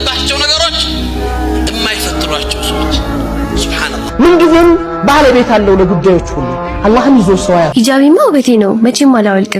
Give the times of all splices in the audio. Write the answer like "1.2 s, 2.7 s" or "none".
7.7 s